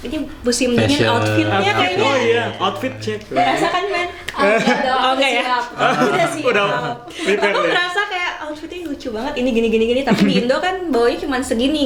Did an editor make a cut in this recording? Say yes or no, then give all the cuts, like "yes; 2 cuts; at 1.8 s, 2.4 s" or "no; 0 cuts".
no; 0 cuts